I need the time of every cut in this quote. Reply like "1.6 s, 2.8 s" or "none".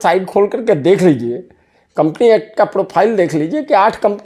none